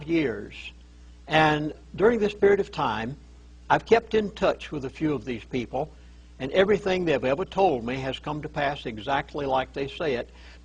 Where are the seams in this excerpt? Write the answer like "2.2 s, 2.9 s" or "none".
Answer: none